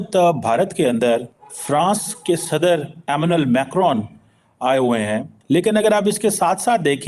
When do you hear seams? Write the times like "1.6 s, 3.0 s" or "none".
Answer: 5.3 s